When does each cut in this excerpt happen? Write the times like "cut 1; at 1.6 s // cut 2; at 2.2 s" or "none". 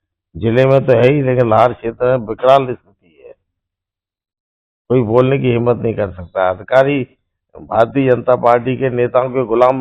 none